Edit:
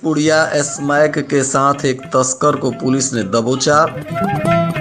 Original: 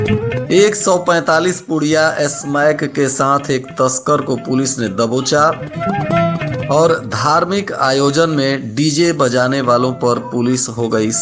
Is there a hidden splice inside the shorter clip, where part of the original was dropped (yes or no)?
no